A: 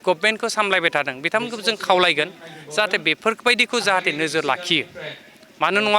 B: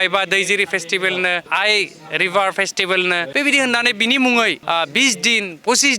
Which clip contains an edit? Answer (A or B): B